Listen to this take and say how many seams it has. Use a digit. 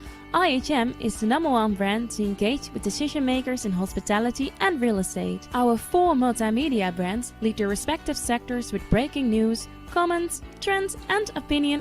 1